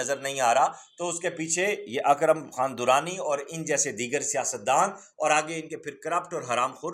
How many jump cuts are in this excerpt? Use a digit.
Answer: 0